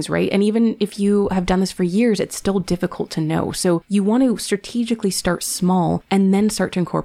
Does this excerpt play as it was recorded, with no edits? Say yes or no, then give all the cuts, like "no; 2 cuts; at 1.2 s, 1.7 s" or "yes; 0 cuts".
no; 2 cuts; at 3.8 s, 6.0 s